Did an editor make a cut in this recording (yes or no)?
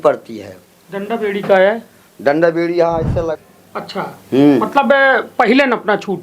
yes